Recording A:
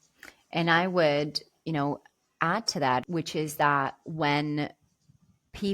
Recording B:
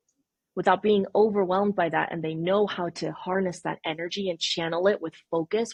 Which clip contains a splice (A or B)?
A